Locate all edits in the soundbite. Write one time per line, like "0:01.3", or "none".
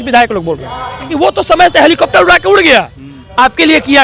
0:01.1